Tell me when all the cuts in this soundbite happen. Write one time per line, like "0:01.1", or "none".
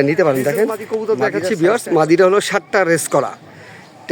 0:01.0